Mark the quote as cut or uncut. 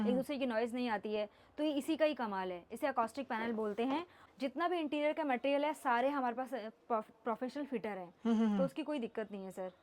cut